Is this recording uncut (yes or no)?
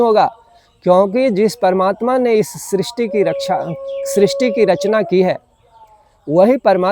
yes